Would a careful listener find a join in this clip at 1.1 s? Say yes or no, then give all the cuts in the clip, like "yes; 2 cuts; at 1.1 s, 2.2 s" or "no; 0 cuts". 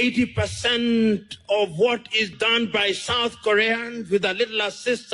no; 1 cut; at 2.3 s